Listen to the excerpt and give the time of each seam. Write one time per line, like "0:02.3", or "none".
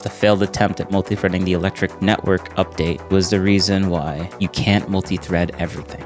0:01.9
0:03.0
0:04.2